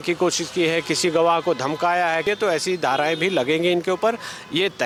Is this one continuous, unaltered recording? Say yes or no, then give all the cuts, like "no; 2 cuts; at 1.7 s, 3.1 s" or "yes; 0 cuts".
yes; 0 cuts